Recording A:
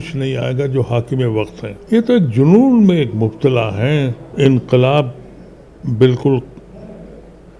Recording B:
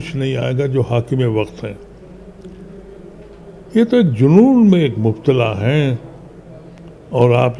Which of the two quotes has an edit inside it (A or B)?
A